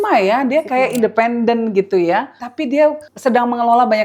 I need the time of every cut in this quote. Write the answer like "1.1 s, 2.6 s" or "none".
2.4 s, 3.1 s